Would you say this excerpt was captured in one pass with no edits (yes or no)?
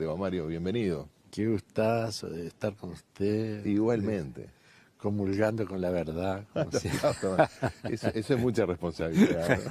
yes